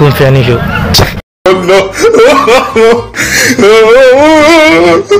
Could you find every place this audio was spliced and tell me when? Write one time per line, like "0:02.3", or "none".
0:01.2